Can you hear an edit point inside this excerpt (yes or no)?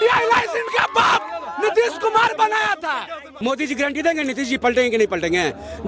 yes